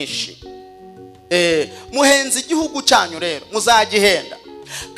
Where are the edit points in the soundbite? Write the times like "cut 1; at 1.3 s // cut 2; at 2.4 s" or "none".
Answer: none